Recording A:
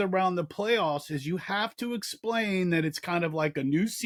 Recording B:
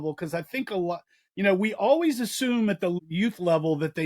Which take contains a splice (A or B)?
B